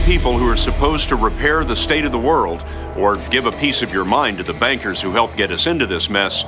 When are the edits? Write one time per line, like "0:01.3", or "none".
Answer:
none